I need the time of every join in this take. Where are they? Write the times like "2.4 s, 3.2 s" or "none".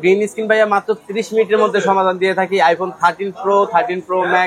none

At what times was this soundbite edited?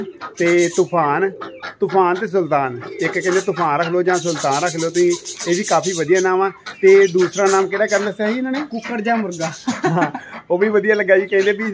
none

